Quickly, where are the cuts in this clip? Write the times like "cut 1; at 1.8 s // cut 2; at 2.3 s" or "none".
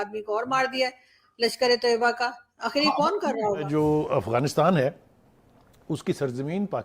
cut 1; at 3.6 s